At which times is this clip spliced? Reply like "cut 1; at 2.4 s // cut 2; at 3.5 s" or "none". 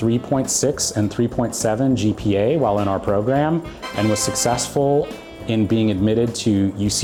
none